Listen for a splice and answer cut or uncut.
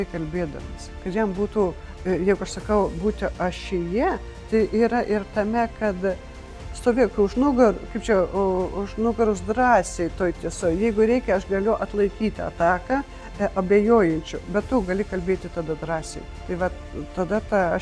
uncut